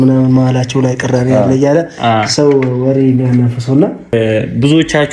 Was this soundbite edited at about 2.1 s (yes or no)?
no